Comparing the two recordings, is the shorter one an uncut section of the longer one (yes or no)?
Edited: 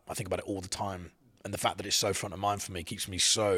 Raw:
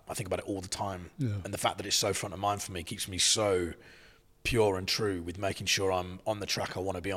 yes